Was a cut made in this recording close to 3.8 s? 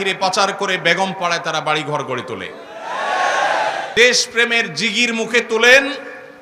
yes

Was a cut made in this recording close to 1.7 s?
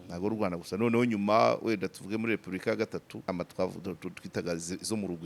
no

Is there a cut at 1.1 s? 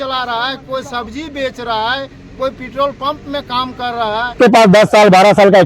no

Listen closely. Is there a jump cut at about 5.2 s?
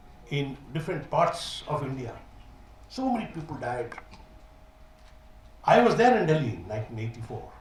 no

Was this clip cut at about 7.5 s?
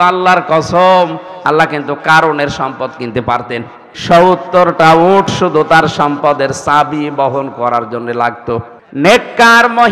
no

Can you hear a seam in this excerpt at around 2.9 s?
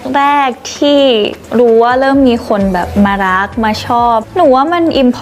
no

